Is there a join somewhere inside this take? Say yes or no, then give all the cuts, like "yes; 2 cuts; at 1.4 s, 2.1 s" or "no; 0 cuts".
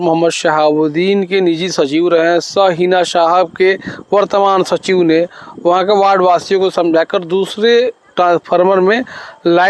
no; 0 cuts